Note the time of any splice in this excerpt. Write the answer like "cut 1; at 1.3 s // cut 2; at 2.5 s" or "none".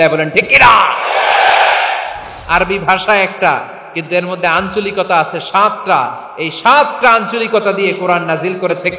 cut 1; at 2.3 s